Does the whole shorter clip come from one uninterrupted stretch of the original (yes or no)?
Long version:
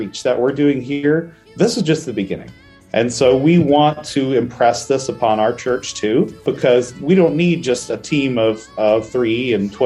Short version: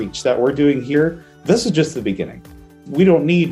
no